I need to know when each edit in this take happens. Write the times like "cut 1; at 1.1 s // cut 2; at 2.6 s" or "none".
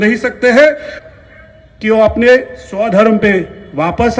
cut 1; at 0.9 s